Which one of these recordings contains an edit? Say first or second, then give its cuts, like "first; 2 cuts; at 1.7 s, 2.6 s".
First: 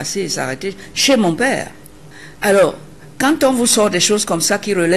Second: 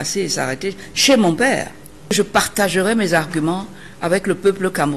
second; 1 cut; at 2.1 s